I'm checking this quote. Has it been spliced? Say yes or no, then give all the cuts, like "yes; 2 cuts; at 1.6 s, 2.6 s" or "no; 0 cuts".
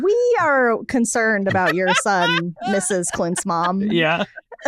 no; 0 cuts